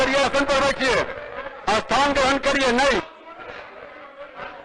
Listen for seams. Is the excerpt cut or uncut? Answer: uncut